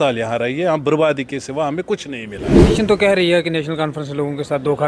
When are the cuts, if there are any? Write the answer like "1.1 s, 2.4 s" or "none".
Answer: 2.7 s